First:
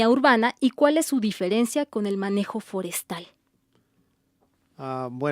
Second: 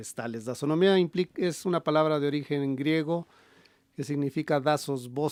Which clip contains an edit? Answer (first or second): first